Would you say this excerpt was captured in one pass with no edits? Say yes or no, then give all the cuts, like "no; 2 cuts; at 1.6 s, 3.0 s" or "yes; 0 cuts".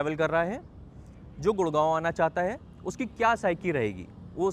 yes; 0 cuts